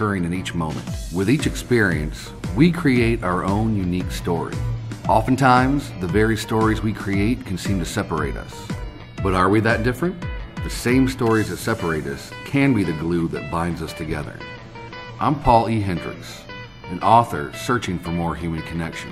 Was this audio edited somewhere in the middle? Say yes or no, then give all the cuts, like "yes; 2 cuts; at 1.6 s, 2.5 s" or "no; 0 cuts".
no; 0 cuts